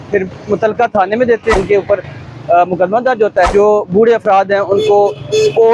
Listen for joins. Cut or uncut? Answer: cut